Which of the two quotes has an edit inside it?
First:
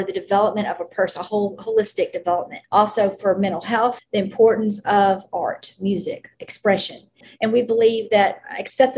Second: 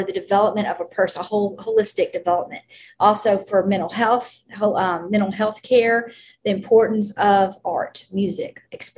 first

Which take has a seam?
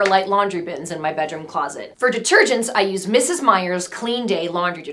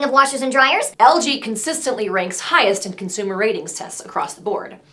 first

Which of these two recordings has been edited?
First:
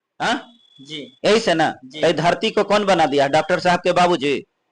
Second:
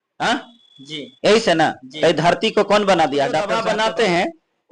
second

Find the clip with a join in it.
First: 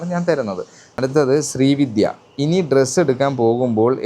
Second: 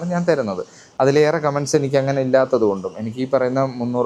first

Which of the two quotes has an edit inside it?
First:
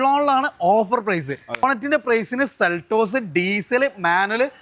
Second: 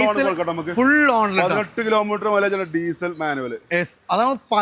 first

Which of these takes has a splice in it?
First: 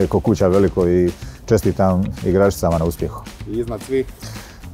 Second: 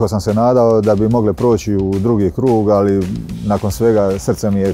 first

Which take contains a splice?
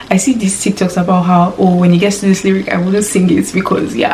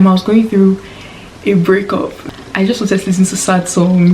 second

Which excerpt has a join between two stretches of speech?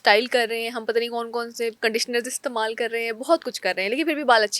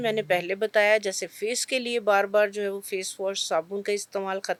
first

